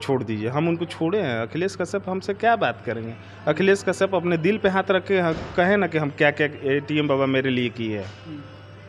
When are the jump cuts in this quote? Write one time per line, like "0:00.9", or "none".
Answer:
none